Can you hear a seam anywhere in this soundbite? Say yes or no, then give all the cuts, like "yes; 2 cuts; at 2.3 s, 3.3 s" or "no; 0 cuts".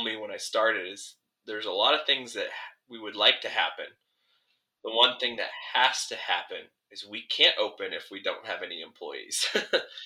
no; 0 cuts